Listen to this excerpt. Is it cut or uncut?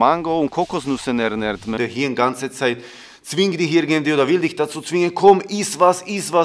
cut